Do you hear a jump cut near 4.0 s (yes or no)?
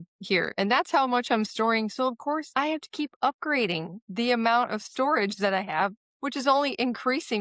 no